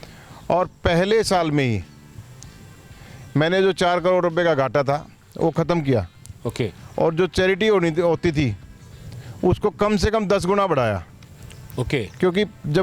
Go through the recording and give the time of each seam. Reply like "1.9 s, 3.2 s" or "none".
none

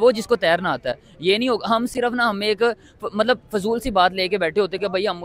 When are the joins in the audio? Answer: none

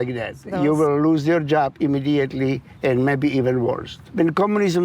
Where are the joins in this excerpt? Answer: 2.7 s, 4.0 s

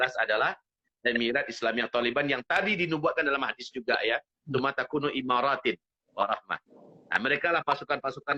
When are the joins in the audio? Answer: none

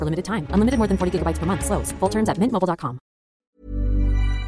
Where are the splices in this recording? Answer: 3.4 s

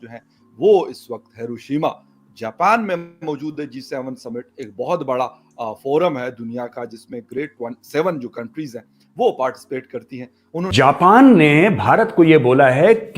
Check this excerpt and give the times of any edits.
10.7 s

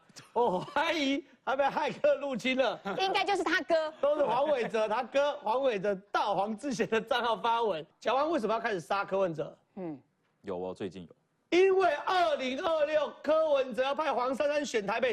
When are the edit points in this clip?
7.9 s

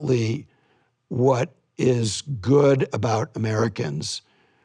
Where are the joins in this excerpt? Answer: 1.6 s

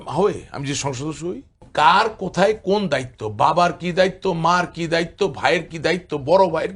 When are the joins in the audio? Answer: 1.7 s

